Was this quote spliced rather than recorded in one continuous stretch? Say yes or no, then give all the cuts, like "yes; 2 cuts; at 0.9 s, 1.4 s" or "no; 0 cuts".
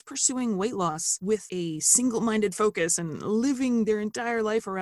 yes; 1 cut; at 1.3 s